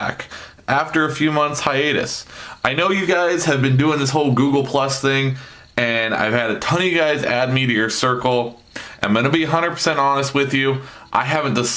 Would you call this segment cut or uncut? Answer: cut